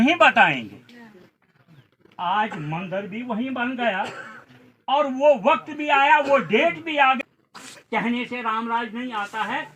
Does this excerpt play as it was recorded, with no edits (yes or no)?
no